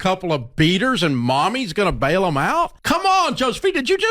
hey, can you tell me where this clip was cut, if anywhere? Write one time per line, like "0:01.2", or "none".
none